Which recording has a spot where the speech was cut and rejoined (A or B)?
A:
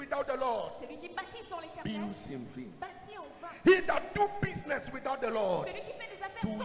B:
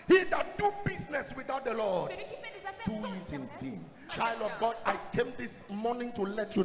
B